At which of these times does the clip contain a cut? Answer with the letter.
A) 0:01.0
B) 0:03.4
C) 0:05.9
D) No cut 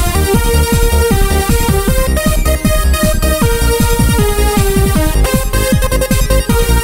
D